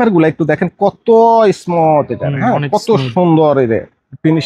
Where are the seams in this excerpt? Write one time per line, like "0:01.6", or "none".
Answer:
none